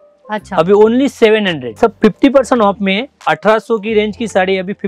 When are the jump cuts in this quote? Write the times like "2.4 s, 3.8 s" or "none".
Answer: 1.8 s, 3.2 s